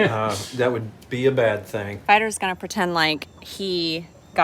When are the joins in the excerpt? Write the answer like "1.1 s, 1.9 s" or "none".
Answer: 1.9 s